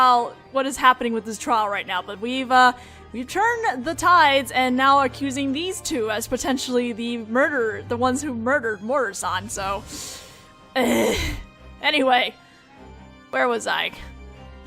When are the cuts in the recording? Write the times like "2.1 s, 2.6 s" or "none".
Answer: 9.9 s